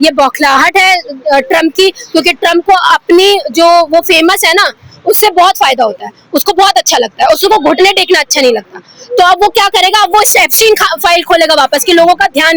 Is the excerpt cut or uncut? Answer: uncut